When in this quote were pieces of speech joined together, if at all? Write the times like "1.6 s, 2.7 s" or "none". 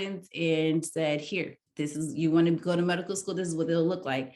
1.6 s